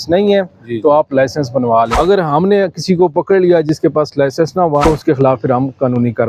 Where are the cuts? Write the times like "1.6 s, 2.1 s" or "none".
1.9 s, 4.8 s